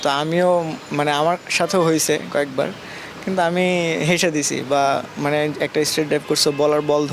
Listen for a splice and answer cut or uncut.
uncut